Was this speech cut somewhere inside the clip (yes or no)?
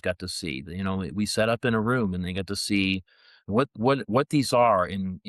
no